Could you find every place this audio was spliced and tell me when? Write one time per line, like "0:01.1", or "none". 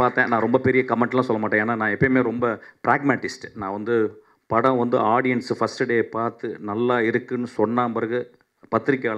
none